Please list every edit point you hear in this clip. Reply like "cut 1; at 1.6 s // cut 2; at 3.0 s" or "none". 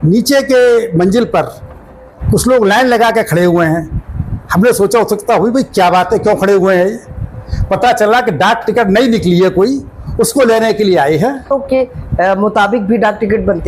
cut 1; at 11.5 s